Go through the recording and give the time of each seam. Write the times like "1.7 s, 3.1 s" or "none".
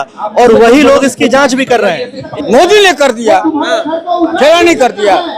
2.2 s